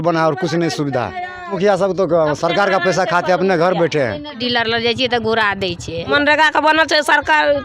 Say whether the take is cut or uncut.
cut